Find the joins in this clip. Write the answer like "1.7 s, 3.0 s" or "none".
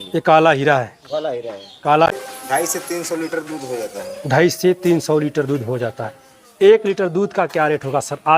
2.1 s

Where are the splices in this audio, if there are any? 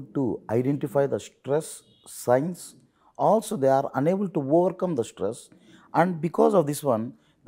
none

